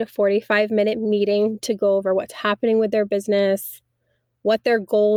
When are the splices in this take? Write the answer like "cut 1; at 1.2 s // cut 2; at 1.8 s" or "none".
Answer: none